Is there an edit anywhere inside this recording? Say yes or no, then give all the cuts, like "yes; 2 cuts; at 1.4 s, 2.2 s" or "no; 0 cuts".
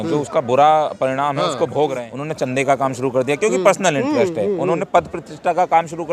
yes; 1 cut; at 2.1 s